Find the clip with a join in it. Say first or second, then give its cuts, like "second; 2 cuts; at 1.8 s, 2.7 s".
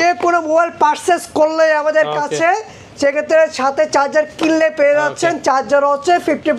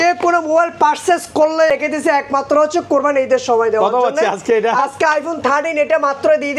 second; 1 cut; at 1.7 s